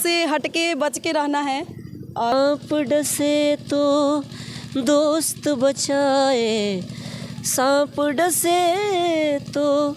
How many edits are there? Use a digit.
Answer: 1